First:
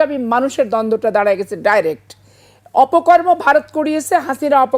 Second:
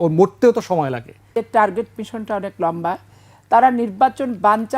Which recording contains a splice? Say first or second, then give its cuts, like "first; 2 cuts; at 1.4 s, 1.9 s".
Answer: second; 1 cut; at 1.4 s